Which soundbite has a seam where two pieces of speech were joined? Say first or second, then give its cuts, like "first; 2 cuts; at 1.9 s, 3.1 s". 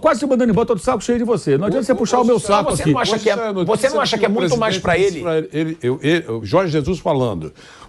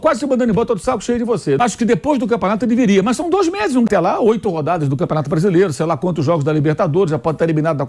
second; 2 cuts; at 1.6 s, 3.9 s